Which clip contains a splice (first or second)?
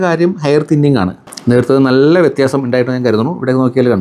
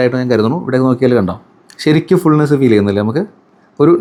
first